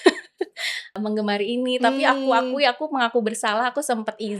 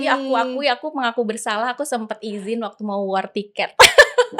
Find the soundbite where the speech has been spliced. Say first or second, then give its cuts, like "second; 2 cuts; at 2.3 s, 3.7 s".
first; 1 cut; at 0.9 s